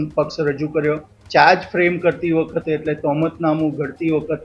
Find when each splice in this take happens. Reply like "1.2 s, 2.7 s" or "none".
1.1 s